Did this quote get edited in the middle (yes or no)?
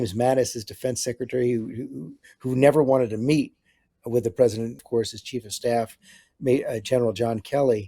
yes